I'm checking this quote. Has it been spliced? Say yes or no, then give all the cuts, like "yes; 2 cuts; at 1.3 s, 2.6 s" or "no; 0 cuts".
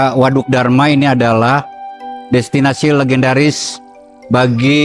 no; 0 cuts